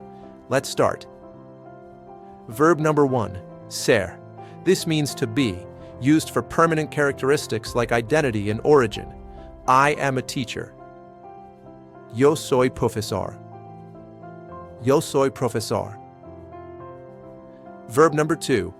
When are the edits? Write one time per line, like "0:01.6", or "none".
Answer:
0:10.7
0:12.1
0:13.3
0:14.8